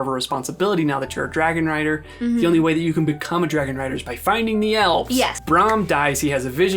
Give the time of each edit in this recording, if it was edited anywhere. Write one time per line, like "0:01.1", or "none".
0:05.4